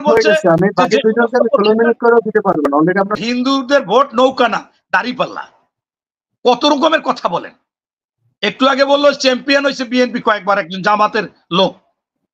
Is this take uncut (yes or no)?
no